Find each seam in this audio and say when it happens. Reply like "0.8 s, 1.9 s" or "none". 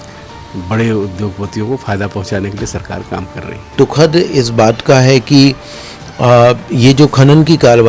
3.7 s